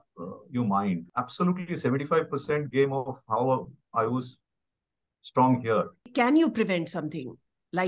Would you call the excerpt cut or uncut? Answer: cut